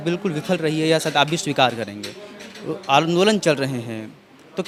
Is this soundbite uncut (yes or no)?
yes